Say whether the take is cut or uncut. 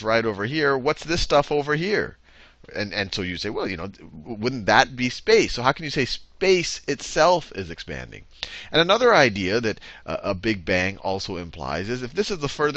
uncut